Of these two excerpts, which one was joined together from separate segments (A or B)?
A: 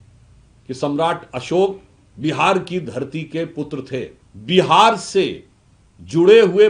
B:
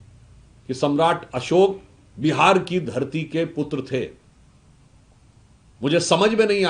A